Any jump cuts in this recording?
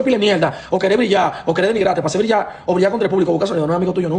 no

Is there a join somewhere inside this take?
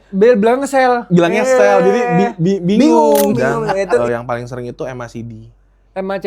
yes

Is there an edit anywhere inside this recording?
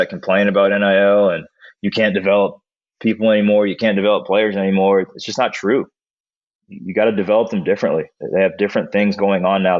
no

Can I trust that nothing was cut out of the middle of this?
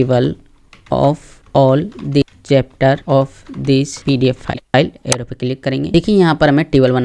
no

